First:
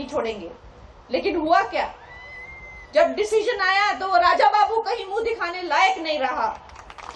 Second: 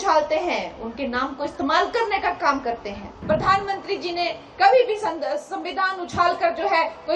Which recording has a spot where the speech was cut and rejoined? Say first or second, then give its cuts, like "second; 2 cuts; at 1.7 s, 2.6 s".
second; 1 cut; at 3.1 s